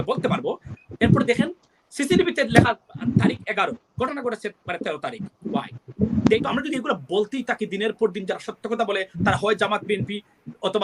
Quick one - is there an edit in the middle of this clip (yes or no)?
yes